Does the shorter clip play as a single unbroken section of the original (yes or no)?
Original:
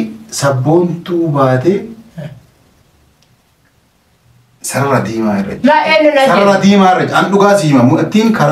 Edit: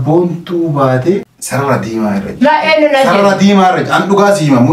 no